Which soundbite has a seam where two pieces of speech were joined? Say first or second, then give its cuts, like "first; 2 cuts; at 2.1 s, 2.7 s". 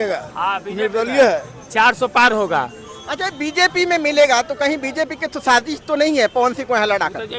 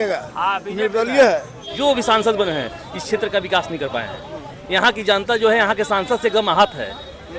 second; 1 cut; at 1.6 s